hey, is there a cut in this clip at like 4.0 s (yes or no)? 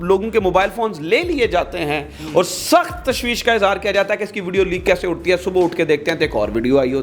no